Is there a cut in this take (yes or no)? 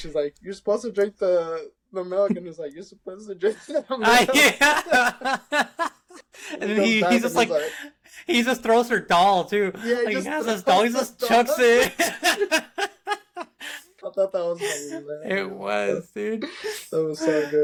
no